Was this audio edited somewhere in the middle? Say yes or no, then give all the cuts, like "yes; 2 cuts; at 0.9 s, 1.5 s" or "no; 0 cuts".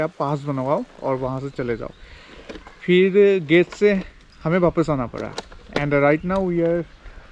no; 0 cuts